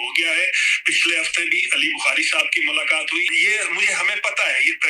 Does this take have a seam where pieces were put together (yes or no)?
yes